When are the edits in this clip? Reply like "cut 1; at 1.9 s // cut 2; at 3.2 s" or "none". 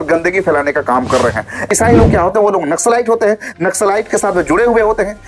cut 1; at 1.7 s